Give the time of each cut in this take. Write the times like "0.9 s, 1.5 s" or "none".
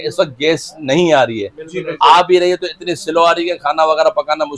none